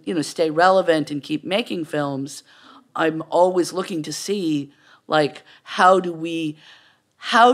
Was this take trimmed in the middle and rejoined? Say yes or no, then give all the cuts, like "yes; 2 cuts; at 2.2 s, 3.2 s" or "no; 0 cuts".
no; 0 cuts